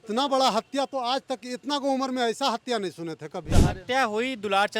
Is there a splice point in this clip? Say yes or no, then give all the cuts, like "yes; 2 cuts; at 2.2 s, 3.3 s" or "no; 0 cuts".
yes; 1 cut; at 3.5 s